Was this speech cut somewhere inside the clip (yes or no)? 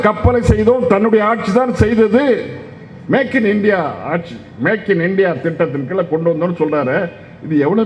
no